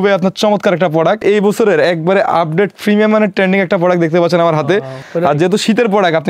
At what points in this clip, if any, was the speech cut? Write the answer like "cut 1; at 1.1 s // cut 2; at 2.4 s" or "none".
cut 1; at 1.2 s // cut 2; at 5.0 s